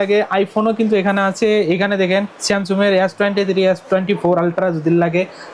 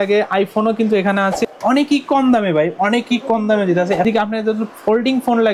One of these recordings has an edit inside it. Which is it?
second; 2 cuts; at 1.4 s, 4.0 s

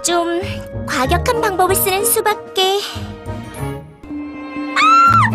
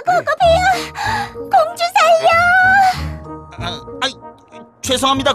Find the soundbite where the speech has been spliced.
first; 1 cut; at 4.0 s

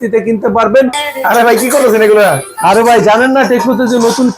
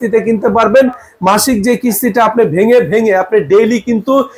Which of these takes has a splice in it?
first; 1 cut; at 1.0 s

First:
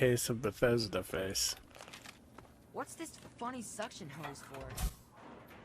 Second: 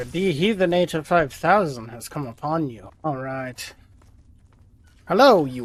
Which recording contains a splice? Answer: first; 1 cut; at 1.6 s

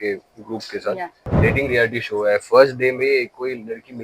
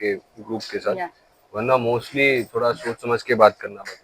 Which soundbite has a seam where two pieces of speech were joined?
first; 1 cut; at 1.2 s

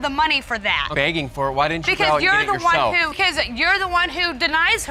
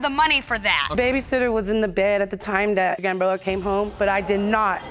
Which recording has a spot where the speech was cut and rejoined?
second; 1 cut; at 0.9 s

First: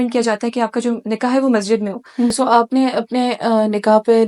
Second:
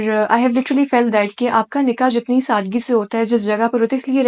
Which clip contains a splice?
first; 1 cut; at 2.3 s

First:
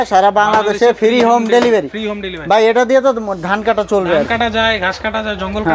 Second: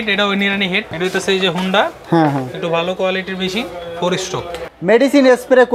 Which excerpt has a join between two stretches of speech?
second; 2 cuts; at 0.9 s, 4.7 s

